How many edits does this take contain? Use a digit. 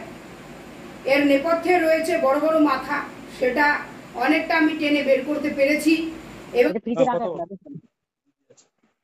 1